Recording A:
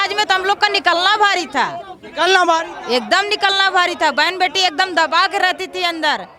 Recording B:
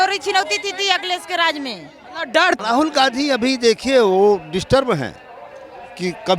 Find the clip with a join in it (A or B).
B